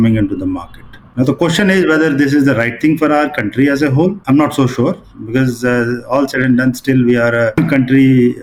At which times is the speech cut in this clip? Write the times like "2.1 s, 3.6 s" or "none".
none